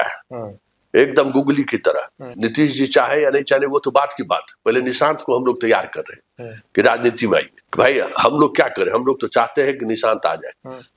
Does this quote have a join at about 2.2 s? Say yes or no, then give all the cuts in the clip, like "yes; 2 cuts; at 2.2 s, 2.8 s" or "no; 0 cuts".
yes; 2 cuts; at 2.2 s, 7.6 s